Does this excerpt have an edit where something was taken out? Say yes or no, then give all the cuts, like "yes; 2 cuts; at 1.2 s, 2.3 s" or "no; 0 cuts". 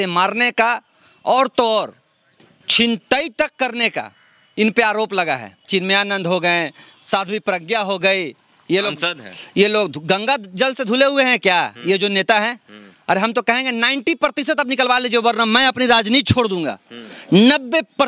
yes; 1 cut; at 5.7 s